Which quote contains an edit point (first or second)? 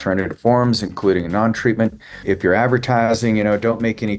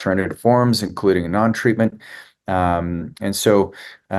first